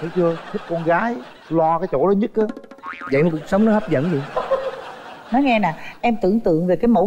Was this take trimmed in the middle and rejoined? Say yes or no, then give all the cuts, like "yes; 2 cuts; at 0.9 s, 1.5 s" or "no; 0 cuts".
no; 0 cuts